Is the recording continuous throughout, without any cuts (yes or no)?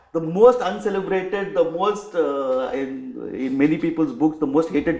yes